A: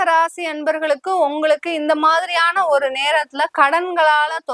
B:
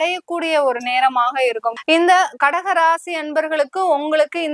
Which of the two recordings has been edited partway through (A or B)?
B